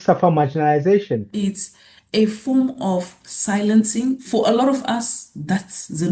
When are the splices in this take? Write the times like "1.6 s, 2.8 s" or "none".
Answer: 1.3 s, 4.2 s